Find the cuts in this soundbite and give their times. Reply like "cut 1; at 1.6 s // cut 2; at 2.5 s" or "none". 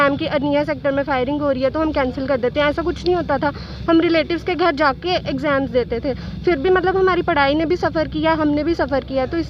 none